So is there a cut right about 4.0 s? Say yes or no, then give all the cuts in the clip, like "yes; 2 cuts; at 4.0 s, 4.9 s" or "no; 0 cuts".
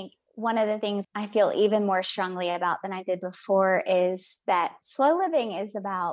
no; 1 cut; at 1.1 s